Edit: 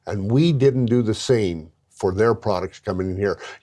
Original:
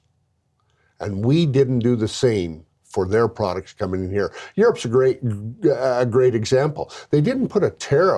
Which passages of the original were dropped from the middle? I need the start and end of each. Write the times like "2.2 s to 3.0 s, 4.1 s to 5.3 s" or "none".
none